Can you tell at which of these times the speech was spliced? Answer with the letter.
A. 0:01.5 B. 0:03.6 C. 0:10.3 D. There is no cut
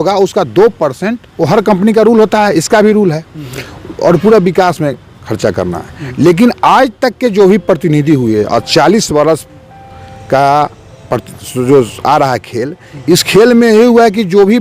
D